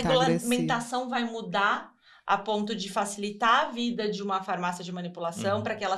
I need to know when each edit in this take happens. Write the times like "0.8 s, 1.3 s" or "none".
none